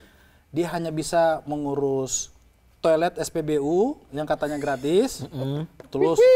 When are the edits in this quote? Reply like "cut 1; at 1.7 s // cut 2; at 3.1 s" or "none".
none